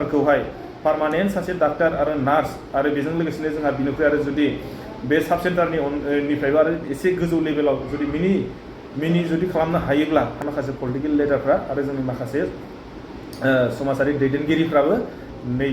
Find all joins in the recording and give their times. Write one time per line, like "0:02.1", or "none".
0:10.4

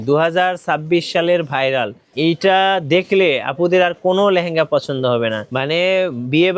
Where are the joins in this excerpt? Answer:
0:02.0
0:05.5

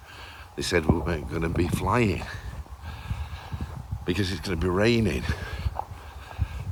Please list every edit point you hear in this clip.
none

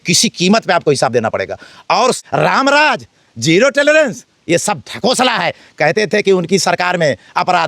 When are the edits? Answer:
0:02.2

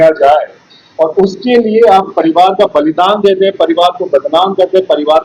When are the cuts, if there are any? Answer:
none

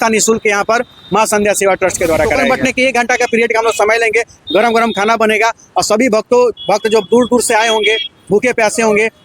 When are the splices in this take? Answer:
0:02.4

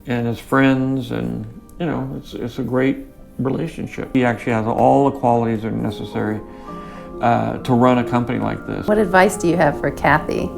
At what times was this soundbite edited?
0:04.1

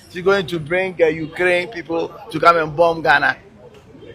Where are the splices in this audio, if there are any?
none

